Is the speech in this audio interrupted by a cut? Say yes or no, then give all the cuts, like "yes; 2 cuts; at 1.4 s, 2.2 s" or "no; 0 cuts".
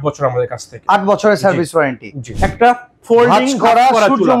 yes; 1 cut; at 2.4 s